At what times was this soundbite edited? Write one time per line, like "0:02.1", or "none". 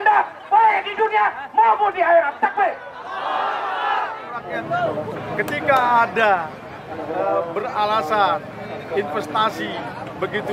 0:04.5